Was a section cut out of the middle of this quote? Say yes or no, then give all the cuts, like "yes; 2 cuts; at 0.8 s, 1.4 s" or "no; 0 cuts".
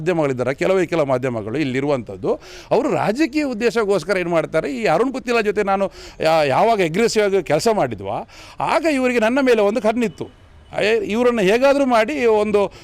no; 0 cuts